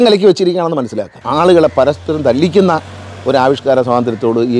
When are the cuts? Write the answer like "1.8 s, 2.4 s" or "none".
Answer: 1.1 s